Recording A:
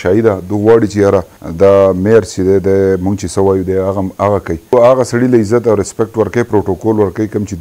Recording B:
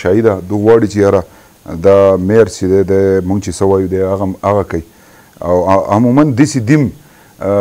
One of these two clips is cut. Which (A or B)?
A